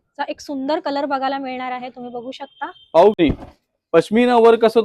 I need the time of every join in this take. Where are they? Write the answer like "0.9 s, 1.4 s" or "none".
3.2 s